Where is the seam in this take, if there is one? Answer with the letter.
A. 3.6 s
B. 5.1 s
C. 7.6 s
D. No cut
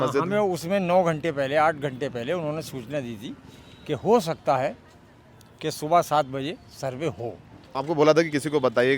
C